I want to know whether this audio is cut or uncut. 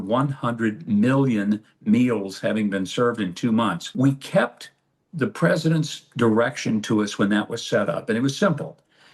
cut